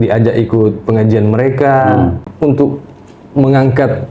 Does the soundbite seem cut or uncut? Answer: cut